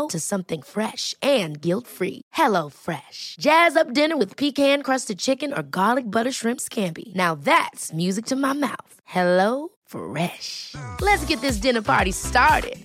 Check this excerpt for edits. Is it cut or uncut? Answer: uncut